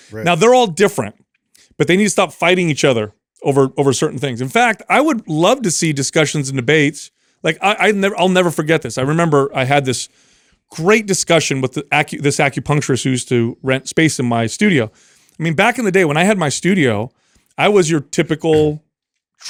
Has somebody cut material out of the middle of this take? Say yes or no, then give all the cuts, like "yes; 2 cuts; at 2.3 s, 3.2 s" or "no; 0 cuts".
no; 0 cuts